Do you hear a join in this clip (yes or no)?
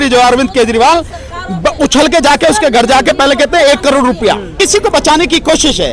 yes